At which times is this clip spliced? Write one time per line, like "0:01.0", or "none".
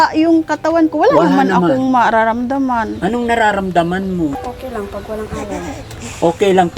0:02.9
0:04.4

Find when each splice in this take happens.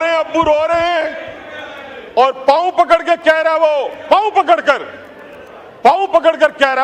none

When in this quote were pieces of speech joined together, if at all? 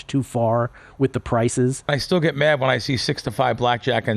0:02.0

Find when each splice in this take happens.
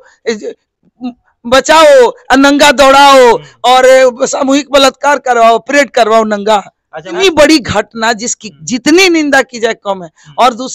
0:07.2

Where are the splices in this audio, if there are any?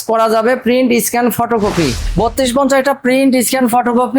0:02.0

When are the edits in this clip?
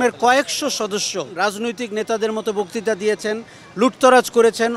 0:01.3

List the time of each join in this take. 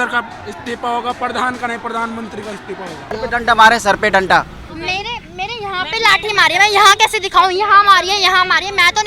0:03.1

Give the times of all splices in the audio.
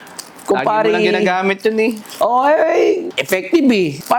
none

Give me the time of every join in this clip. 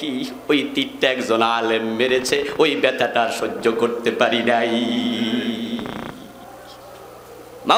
0:06.7

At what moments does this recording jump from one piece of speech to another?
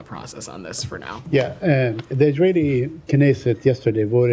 0:01.2

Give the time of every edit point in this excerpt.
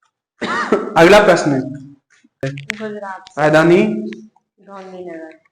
0:02.4

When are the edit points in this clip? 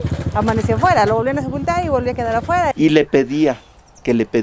0:02.7

